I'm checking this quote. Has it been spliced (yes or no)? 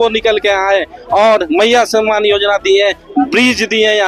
no